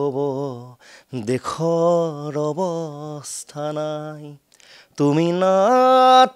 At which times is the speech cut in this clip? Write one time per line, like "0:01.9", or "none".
none